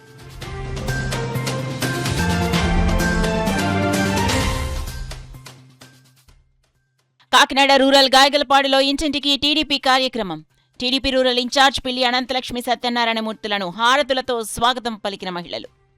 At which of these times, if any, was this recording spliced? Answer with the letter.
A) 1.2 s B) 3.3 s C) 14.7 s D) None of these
A